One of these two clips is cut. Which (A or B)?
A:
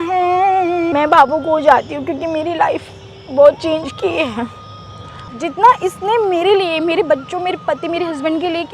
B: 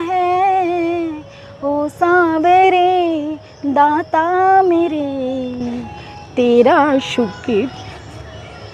A